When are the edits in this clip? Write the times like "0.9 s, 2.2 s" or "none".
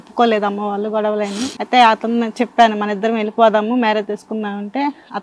1.5 s